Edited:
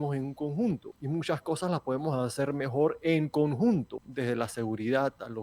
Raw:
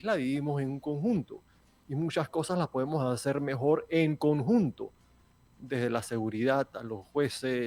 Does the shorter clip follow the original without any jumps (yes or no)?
no